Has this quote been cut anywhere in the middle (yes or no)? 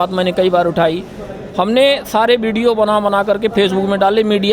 no